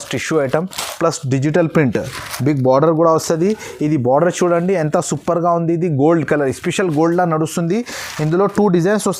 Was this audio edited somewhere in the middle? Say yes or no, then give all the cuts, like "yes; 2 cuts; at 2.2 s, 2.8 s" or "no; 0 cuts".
no; 0 cuts